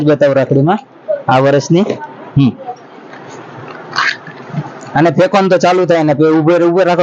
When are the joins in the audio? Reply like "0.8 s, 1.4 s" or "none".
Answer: none